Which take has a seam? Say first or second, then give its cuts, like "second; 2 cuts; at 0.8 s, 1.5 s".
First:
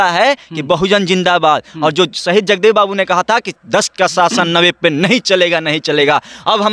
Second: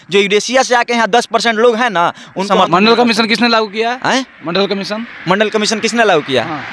second; 1 cut; at 2.4 s